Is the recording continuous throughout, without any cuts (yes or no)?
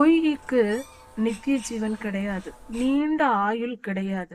no